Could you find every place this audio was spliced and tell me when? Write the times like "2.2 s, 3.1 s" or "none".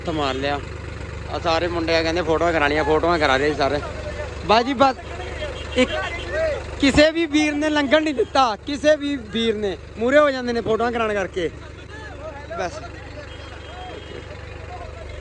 none